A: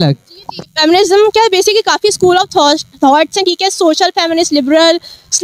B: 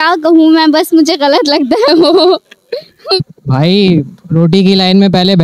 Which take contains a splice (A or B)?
B